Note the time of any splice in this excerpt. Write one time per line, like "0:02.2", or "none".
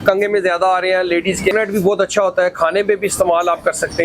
0:01.5